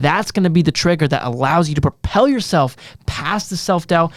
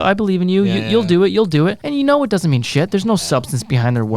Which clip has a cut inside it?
second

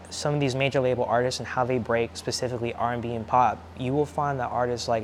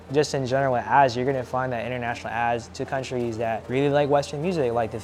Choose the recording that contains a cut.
second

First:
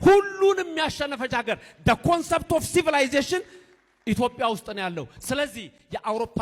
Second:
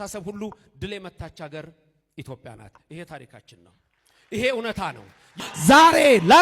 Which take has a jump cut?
second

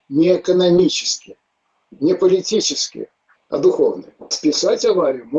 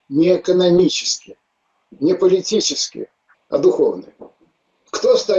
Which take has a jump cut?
first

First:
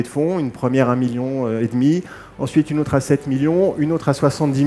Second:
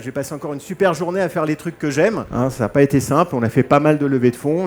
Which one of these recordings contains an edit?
second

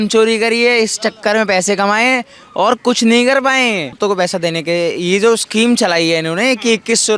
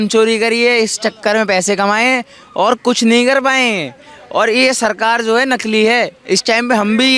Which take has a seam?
first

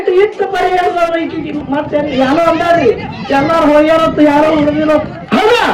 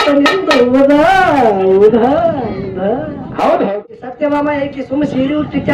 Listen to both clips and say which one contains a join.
second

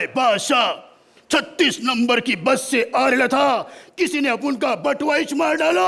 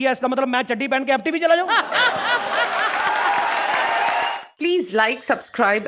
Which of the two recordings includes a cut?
second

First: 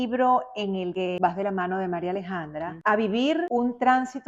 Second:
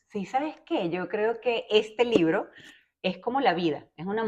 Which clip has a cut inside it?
first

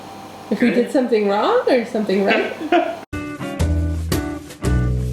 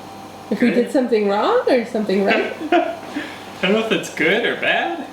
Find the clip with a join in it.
second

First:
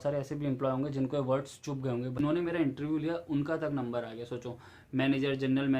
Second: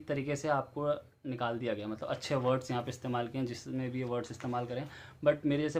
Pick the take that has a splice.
first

